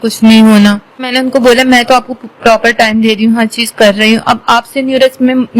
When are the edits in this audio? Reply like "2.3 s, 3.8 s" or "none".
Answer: 1.1 s